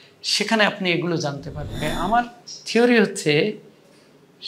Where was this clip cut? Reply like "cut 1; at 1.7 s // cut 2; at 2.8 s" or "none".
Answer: cut 1; at 1.7 s